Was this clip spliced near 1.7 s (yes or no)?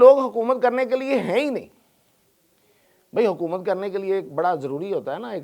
no